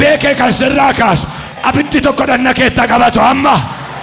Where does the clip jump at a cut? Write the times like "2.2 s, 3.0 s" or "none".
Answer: none